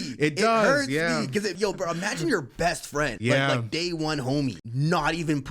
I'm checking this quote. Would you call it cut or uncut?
cut